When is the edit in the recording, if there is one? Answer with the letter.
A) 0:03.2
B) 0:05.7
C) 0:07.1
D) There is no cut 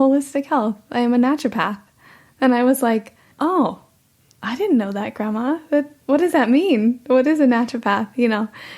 A